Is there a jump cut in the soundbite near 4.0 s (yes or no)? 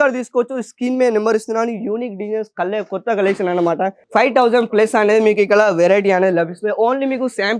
yes